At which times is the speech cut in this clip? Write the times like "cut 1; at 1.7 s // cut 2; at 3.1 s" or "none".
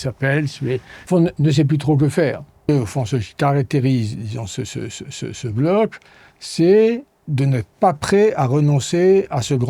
cut 1; at 0.9 s // cut 2; at 2.7 s

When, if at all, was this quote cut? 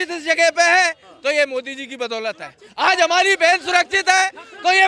none

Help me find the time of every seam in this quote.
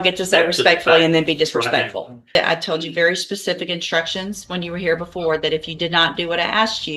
cut 1; at 2.4 s

